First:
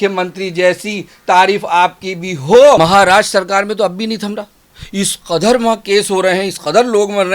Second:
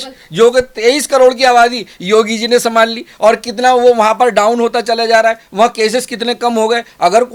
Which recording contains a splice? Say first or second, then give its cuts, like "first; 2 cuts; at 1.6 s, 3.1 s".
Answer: first; 1 cut; at 2.8 s